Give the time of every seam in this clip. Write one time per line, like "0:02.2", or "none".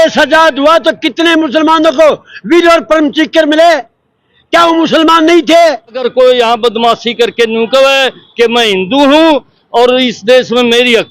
0:06.0

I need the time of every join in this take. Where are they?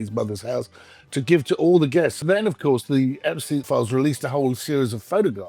0:02.2
0:03.7

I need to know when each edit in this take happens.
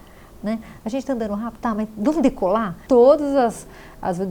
0:02.8

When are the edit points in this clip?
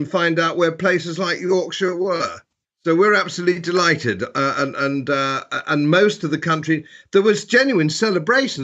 none

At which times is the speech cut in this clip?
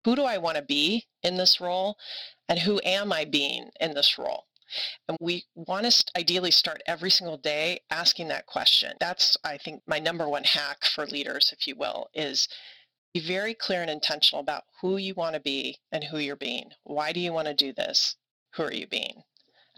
0:01.1
0:05.2
0:09.7
0:15.8

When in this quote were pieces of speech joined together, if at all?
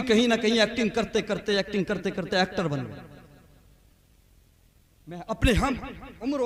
none

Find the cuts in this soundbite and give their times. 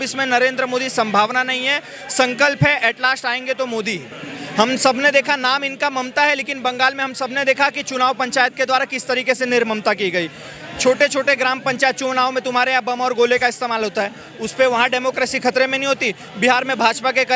none

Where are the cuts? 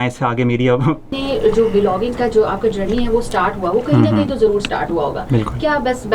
0:01.1

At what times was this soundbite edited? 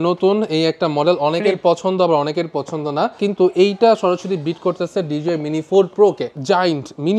0:03.2
0:06.3

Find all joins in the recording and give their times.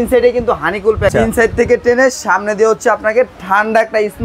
0:01.1

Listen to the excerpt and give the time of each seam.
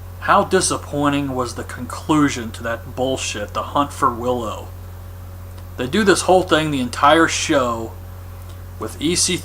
0:01.2

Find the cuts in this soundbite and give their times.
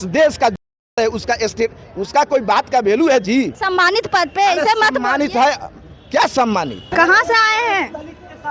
none

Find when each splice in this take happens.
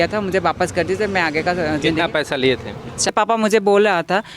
0:03.1

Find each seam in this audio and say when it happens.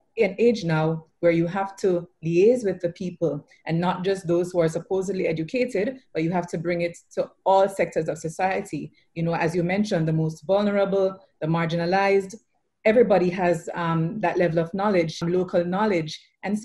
0:15.2

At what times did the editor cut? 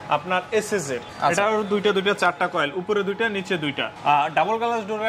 0:01.1
0:03.9

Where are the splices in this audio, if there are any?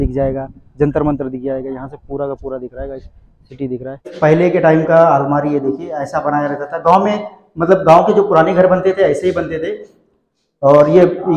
0:04.1

